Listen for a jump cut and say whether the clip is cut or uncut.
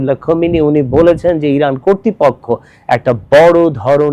uncut